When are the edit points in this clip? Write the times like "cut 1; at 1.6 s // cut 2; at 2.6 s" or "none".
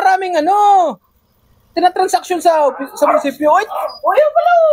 none